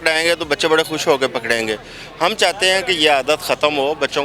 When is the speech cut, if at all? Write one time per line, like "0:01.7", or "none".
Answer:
none